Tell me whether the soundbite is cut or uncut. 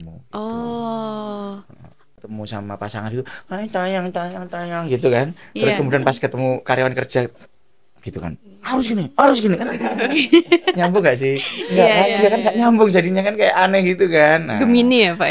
cut